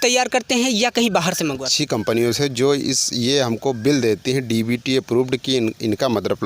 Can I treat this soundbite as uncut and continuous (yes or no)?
no